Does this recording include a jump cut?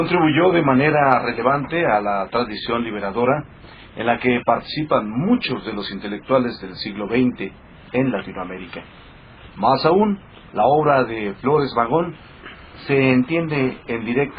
yes; 1 cut; at 11.1 s

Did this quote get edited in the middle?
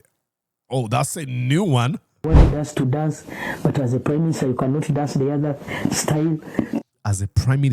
yes; 1 cut; at 2.2 s

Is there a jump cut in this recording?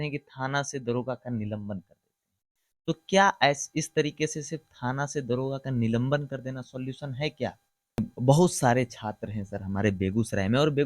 yes; 1 cut; at 8.1 s

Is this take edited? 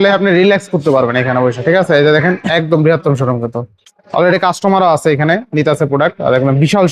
no; 0 cuts

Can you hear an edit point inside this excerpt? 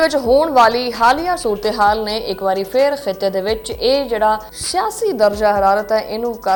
no; 0 cuts

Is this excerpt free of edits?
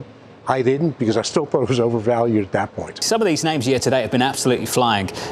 no; 1 cut; at 3.0 s

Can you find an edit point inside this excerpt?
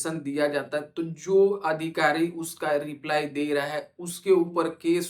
no; 0 cuts

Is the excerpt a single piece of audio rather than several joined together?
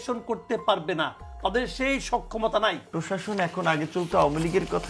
no; 1 cut; at 2.9 s

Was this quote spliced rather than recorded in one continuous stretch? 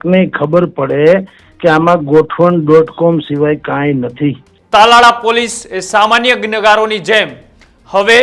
yes; 1 cut; at 4.5 s

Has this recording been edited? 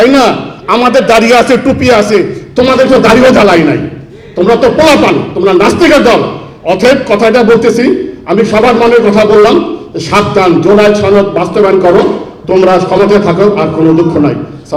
no; 0 cuts

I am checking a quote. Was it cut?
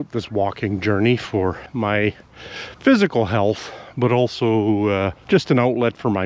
yes; 2 cuts; at 1.6 s, 5.2 s

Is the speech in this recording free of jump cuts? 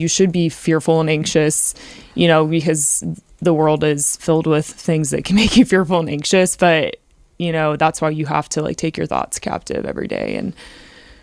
yes; 0 cuts

